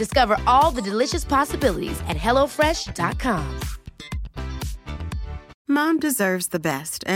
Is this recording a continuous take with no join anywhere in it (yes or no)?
no